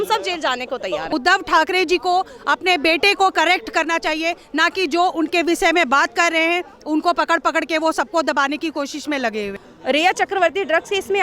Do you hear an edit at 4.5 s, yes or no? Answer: no